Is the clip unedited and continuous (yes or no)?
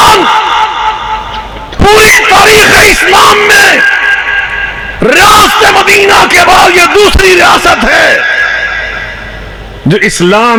yes